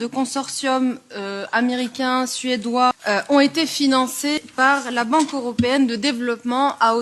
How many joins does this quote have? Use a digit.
2